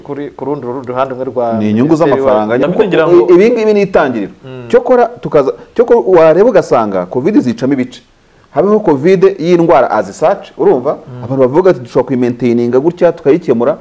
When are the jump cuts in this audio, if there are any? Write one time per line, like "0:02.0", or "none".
0:02.6